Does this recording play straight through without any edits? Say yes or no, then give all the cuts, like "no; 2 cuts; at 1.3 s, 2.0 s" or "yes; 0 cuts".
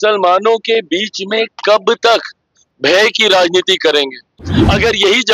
no; 1 cut; at 4.4 s